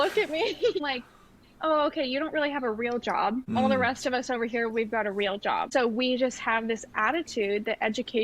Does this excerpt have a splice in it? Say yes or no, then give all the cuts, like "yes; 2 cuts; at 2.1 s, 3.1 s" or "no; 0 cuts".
yes; 3 cuts; at 0.8 s, 3.6 s, 5.7 s